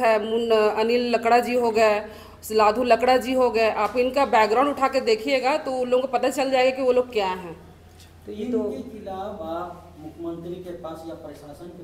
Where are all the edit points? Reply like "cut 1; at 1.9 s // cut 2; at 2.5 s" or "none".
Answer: none